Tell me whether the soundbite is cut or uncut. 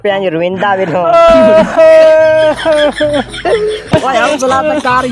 cut